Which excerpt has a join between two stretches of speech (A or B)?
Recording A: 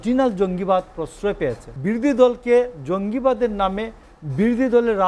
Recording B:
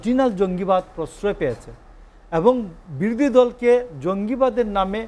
A